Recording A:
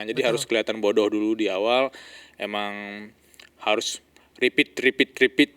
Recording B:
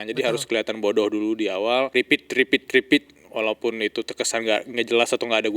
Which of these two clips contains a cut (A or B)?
B